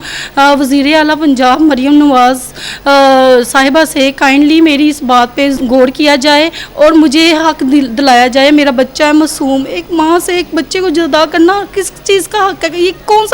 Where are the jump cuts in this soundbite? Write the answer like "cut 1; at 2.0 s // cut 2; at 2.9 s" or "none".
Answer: cut 1; at 5.6 s